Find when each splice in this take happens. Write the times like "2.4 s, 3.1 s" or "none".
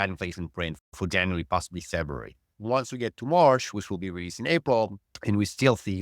2.5 s, 5.1 s